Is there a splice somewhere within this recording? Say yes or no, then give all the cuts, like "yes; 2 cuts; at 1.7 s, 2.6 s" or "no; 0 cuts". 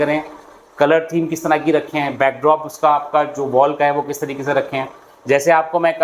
no; 0 cuts